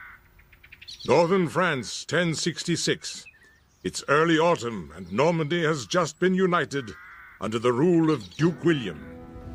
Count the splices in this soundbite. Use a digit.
1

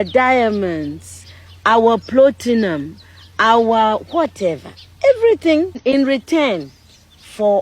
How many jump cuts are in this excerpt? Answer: 1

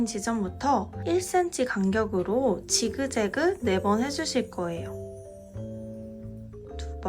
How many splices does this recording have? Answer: 1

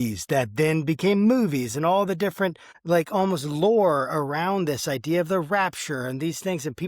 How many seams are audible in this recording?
1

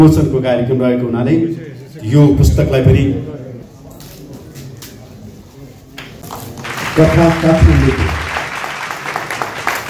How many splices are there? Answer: 1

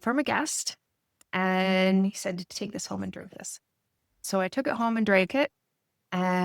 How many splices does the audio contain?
1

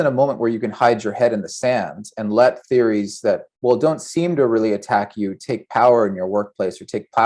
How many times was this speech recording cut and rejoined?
1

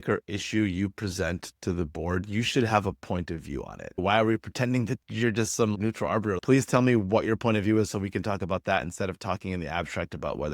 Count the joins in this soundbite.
2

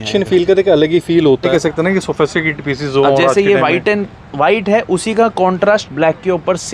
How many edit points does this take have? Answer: 1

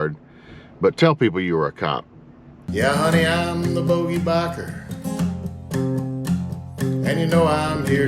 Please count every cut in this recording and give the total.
1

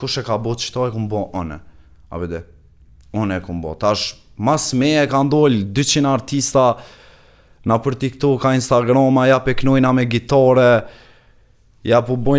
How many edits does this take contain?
0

